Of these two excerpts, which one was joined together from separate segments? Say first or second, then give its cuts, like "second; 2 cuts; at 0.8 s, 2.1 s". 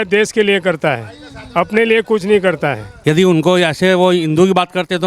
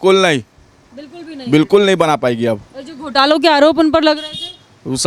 first; 1 cut; at 2.9 s